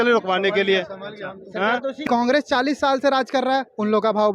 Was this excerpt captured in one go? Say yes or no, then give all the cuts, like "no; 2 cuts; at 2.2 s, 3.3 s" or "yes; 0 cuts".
no; 1 cut; at 2.0 s